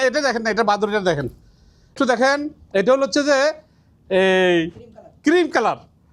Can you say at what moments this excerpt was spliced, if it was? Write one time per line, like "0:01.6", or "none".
0:01.8